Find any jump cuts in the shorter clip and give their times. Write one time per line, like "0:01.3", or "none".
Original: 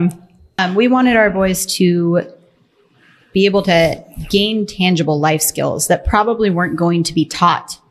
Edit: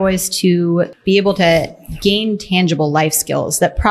0:01.0